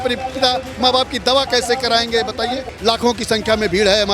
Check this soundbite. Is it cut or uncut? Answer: cut